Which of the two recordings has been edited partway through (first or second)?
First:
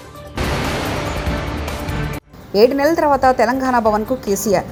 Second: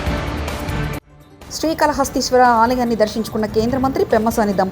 second